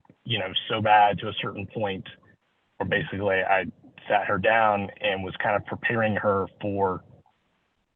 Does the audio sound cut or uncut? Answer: uncut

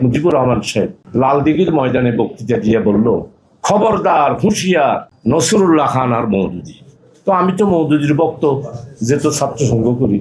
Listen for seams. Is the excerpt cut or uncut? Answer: cut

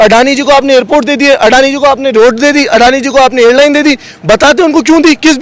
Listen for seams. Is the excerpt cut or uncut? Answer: uncut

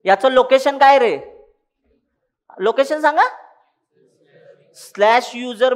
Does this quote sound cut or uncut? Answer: uncut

